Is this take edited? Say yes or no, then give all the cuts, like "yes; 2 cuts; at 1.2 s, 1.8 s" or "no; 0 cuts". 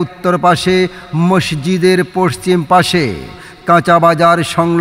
no; 0 cuts